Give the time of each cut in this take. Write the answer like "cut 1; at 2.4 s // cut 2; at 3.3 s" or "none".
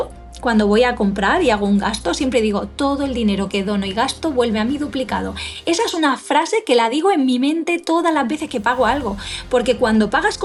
none